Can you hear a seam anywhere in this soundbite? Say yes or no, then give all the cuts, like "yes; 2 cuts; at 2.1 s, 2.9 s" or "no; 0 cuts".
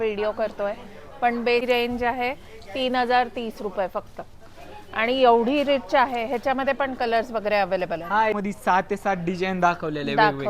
yes; 2 cuts; at 1.6 s, 8.4 s